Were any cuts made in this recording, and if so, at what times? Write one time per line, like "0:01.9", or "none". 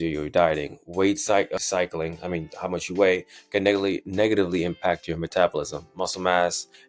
none